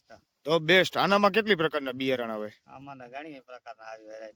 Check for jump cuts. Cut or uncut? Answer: uncut